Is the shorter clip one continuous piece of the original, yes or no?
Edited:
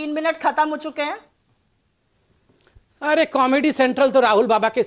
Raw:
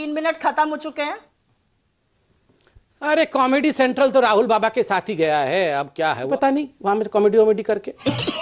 yes